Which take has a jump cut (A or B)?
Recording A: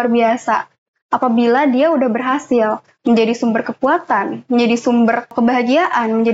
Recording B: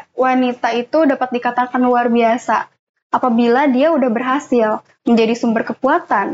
A